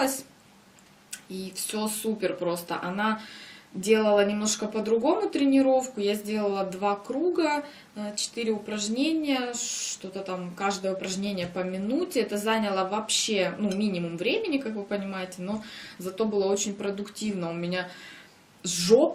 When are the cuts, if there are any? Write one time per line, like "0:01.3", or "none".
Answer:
0:08.5